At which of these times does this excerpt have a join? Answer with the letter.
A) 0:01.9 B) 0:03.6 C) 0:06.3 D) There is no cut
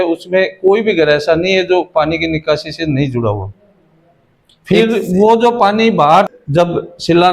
C